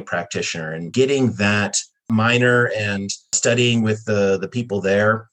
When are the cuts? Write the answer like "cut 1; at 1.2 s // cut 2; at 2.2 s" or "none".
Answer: cut 1; at 0.9 s // cut 2; at 2.1 s // cut 3; at 3.4 s

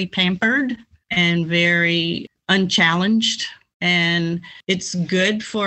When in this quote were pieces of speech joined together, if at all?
cut 1; at 0.9 s // cut 2; at 2.3 s // cut 3; at 3.6 s // cut 4; at 4.5 s

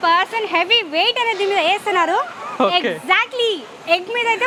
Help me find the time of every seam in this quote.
none

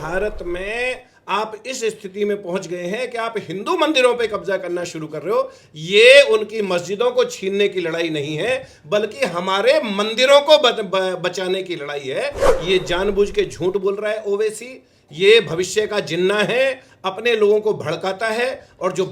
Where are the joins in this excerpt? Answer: cut 1; at 12.5 s

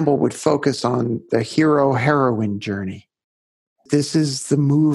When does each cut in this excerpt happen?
cut 1; at 3.8 s

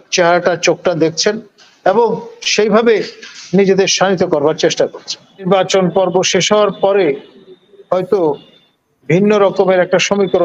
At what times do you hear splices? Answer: cut 1; at 5.5 s

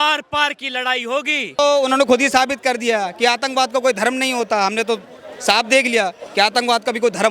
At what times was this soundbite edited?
cut 1; at 1.6 s

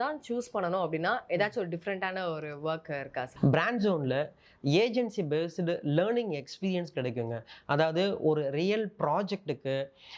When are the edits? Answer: cut 1; at 3.3 s

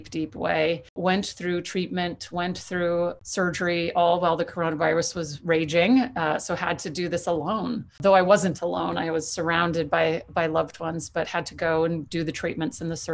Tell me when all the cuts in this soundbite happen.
cut 1; at 1.0 s // cut 2; at 3.2 s // cut 3; at 8.0 s

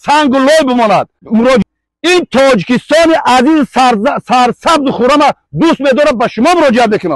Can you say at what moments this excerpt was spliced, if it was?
cut 1; at 1.6 s

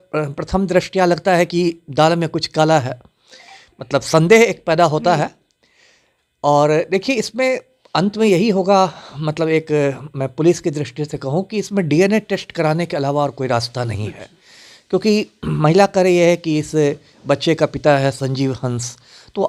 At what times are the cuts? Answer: none

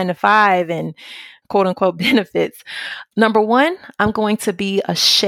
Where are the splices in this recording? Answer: cut 1; at 1.3 s

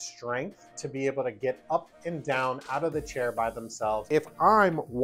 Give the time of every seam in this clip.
cut 1; at 4.1 s

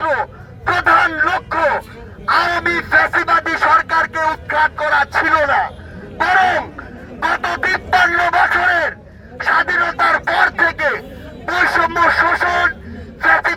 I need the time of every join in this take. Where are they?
none

